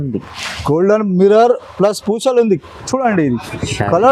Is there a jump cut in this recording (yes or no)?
yes